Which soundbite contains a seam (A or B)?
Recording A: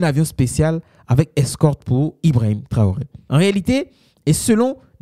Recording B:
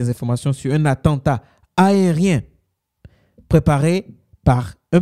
A